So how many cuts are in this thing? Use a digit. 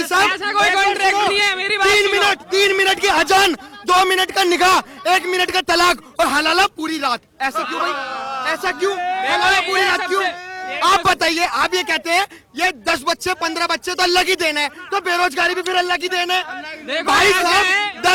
0